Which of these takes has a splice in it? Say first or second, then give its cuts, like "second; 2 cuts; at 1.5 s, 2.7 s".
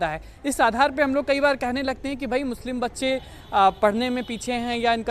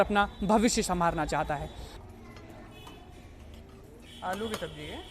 second; 1 cut; at 2.0 s